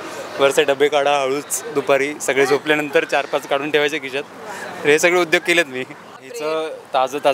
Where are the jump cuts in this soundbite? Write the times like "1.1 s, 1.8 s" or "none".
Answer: 6.2 s